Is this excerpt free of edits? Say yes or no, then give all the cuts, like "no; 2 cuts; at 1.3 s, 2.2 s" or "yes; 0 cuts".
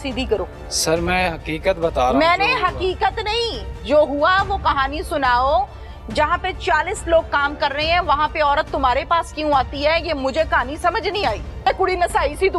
no; 1 cut; at 11.6 s